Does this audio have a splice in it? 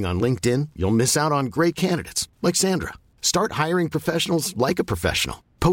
no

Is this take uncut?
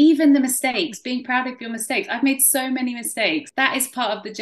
no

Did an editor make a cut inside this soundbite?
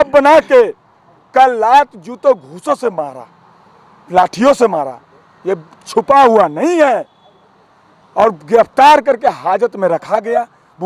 no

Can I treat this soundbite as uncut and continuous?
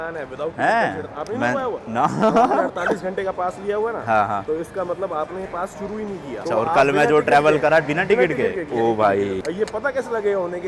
yes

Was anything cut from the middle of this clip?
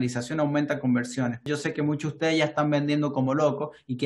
yes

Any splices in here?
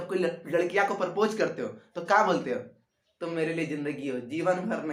no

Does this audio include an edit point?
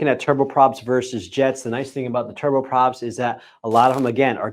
no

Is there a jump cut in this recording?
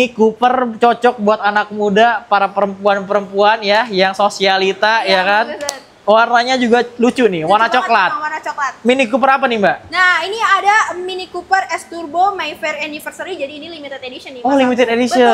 no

